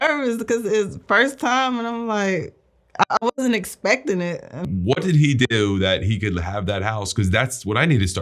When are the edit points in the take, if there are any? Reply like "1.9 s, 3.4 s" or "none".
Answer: 4.6 s